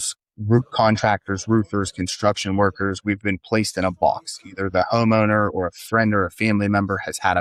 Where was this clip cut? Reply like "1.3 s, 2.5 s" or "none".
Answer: none